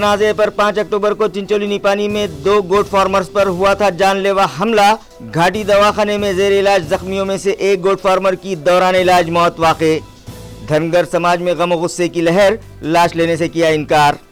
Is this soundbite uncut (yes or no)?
yes